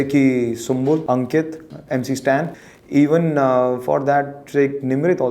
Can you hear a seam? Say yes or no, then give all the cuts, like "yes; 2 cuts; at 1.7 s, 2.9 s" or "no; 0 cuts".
yes; 2 cuts; at 1.0 s, 2.6 s